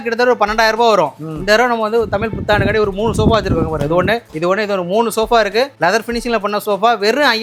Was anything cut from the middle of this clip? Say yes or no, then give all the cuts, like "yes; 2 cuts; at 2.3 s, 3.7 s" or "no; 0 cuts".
no; 0 cuts